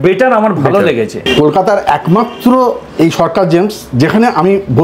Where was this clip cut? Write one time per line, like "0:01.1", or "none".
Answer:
0:01.2